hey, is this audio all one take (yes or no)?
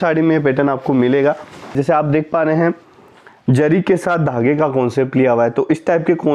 no